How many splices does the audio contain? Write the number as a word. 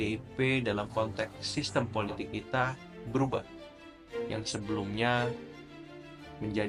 zero